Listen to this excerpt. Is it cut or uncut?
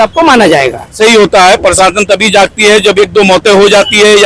cut